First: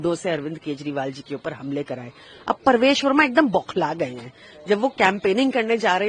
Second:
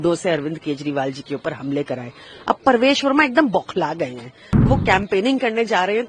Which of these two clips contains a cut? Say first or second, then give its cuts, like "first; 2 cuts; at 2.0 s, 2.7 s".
second; 1 cut; at 4.7 s